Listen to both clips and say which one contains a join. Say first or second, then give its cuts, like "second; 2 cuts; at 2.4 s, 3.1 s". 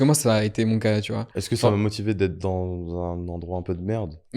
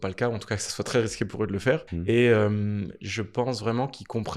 second; 1 cut; at 1.9 s